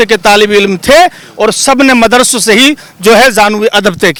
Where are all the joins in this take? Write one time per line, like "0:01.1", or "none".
none